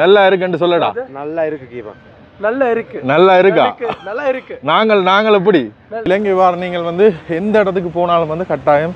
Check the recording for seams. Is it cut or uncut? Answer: cut